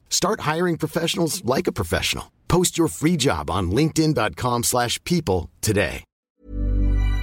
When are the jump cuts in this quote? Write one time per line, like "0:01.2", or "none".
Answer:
0:06.1